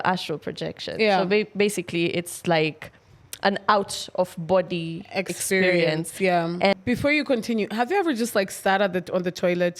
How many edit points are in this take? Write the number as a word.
one